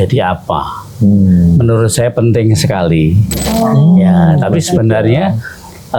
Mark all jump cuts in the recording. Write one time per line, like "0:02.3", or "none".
0:03.5